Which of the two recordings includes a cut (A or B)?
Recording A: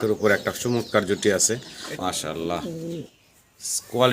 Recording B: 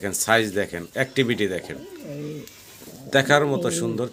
A